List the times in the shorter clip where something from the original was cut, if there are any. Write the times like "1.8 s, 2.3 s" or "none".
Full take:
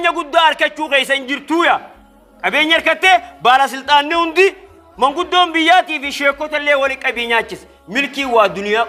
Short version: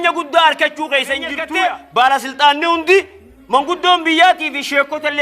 1.4 s